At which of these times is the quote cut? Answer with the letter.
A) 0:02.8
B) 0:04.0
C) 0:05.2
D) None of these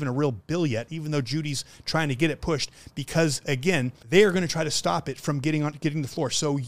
B